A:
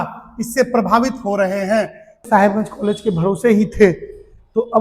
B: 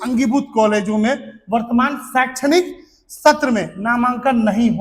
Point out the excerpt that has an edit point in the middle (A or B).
A